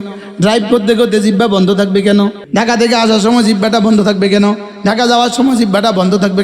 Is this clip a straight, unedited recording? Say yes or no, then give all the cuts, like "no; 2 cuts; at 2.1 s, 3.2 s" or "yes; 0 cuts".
no; 1 cut; at 2.4 s